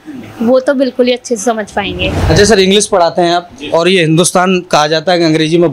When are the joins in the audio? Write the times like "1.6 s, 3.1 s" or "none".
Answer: 2.2 s

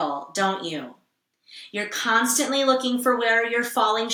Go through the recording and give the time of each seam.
none

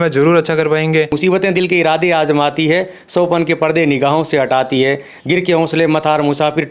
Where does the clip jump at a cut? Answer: 1.2 s

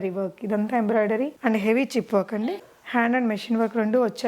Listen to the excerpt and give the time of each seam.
1.3 s

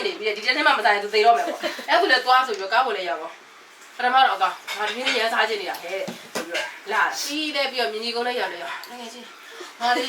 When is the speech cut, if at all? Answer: none

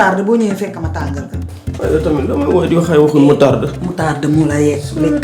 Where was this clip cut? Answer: none

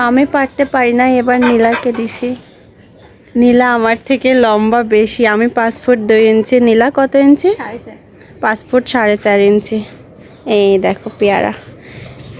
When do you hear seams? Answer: none

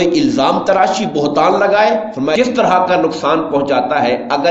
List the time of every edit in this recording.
2.4 s

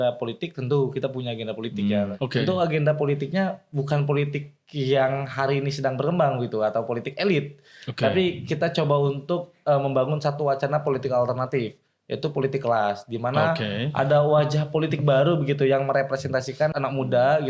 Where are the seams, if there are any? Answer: 2.1 s, 16.7 s

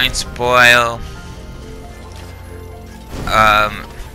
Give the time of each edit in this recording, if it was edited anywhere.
none

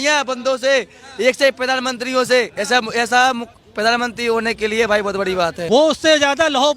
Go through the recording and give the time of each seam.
5.6 s

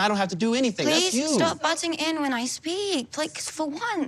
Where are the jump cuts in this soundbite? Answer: none

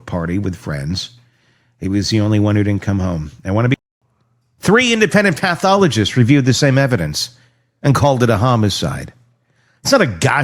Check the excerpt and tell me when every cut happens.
3.8 s

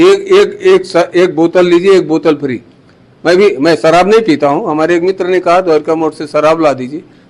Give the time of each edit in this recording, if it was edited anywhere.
none

